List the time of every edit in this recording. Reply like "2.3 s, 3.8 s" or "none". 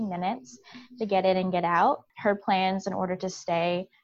2.1 s